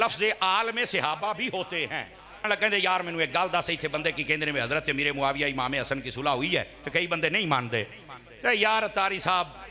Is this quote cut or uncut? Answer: cut